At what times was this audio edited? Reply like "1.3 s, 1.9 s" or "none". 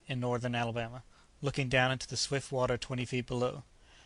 1.6 s